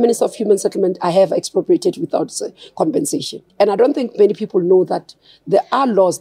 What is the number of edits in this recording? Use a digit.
1